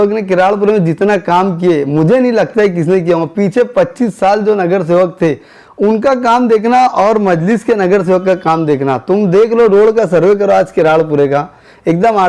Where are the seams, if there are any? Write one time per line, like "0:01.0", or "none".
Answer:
none

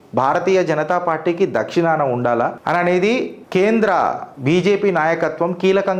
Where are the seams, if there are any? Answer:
0:02.6
0:03.4
0:04.3

